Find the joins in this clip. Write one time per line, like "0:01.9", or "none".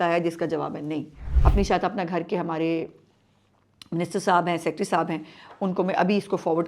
0:01.2